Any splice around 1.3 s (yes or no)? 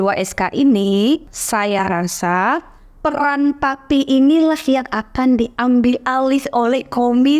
yes